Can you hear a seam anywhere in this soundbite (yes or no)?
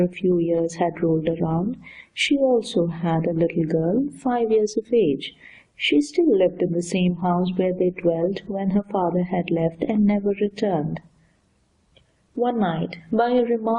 no